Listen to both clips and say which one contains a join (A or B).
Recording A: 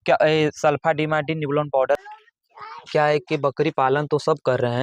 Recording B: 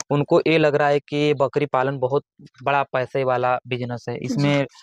A